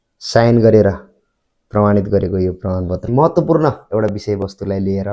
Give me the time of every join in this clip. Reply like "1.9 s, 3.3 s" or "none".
3.1 s